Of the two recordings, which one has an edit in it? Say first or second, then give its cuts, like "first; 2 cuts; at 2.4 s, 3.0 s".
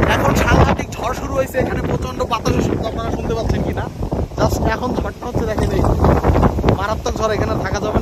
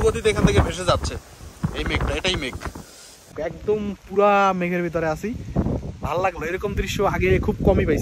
second; 1 cut; at 3.3 s